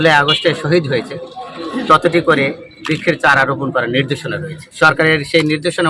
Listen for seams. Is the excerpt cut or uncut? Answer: uncut